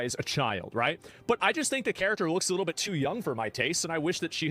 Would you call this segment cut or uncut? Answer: uncut